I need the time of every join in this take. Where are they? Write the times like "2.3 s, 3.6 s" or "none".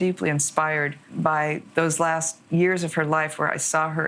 1.0 s, 2.4 s